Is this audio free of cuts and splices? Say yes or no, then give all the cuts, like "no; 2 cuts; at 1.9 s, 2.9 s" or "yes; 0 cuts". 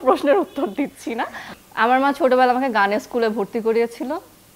no; 1 cut; at 1.5 s